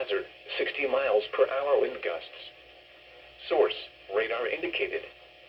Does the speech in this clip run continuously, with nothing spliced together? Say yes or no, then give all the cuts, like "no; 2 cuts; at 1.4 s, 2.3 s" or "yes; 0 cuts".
yes; 0 cuts